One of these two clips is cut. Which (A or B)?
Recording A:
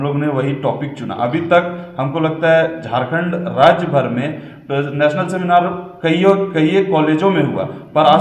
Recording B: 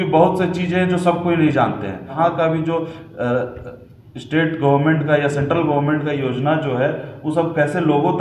B